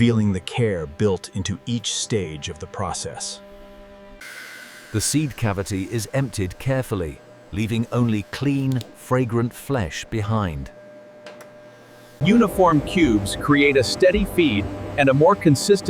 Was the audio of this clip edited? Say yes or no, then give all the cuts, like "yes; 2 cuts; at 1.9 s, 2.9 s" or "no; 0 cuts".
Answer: yes; 2 cuts; at 4.2 s, 12.1 s